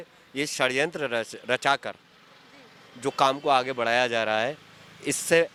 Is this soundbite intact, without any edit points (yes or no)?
yes